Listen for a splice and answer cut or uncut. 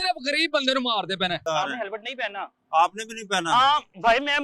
cut